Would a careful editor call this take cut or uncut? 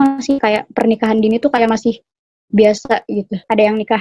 uncut